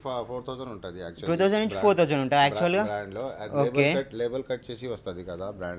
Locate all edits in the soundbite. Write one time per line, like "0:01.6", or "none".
none

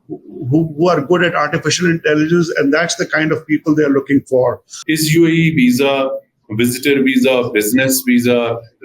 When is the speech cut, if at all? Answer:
0:04.7

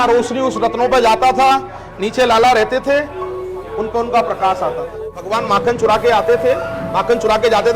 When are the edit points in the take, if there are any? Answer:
0:05.3

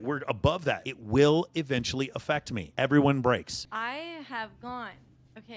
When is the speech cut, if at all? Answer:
0:00.9
0:03.6

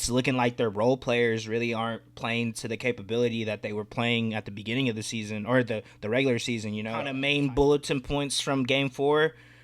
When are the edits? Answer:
0:07.2

